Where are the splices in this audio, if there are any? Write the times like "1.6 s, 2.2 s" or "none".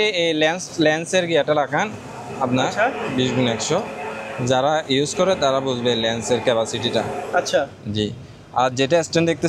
none